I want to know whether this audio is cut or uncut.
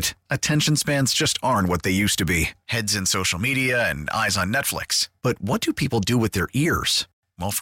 uncut